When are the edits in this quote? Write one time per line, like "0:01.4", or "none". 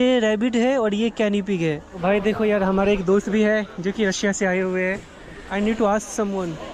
0:01.9
0:05.4